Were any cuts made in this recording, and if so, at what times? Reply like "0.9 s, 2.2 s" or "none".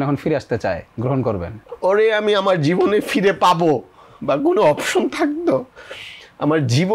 1.6 s